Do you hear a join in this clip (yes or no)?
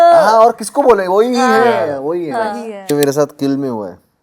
yes